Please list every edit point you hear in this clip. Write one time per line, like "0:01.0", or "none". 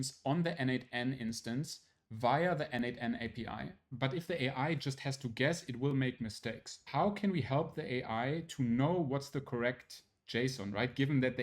0:03.8
0:06.8